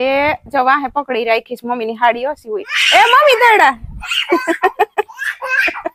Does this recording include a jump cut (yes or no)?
no